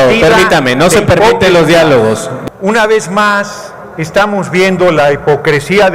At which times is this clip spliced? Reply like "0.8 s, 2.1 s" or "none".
2.3 s